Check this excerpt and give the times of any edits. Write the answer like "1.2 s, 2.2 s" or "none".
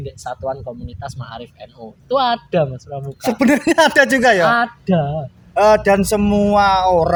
none

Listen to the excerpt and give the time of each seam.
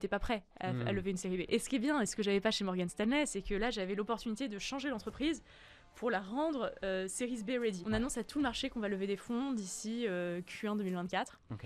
1.5 s, 7.8 s

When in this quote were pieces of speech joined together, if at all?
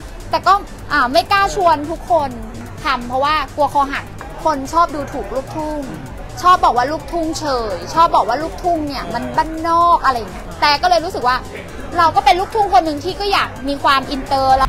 2.6 s, 4.2 s, 10.5 s

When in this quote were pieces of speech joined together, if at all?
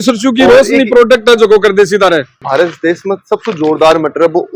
2.4 s

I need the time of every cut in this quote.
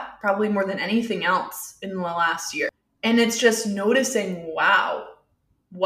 2.9 s

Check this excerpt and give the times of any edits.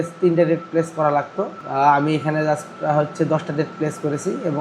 1.6 s

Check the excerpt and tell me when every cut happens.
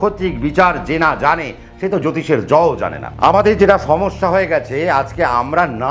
3.1 s

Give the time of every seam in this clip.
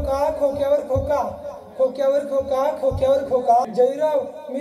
3.7 s

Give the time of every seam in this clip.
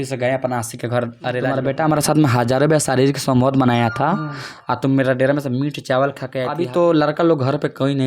1.2 s, 6.6 s

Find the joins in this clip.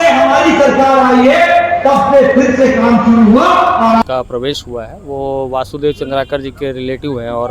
4.0 s

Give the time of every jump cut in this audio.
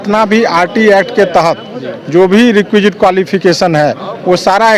none

